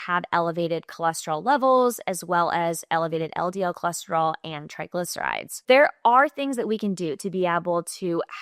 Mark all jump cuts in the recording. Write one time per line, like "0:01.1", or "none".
0:05.5

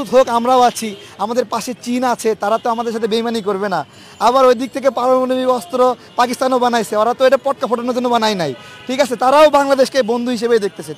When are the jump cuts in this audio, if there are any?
none

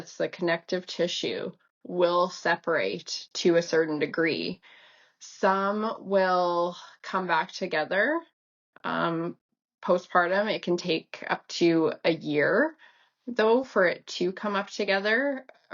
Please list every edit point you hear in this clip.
none

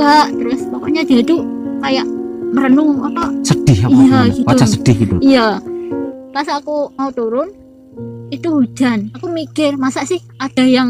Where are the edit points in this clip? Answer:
0:06.1

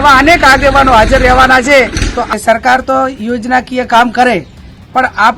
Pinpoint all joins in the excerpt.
0:02.2

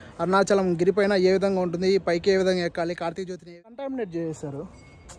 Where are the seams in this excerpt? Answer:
0:03.3

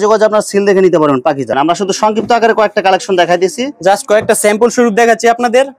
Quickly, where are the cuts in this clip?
0:01.5

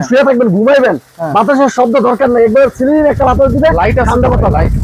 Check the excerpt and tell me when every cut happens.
none

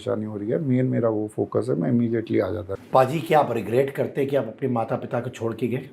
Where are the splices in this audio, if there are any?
0:02.8

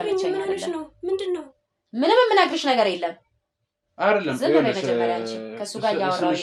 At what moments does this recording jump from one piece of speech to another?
none

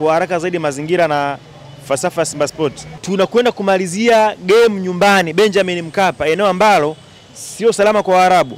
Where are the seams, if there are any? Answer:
0:02.9

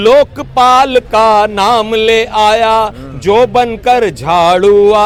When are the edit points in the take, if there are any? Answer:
none

